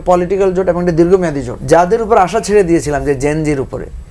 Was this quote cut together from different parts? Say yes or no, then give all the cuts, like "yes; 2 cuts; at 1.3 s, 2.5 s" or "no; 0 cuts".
yes; 1 cut; at 1.5 s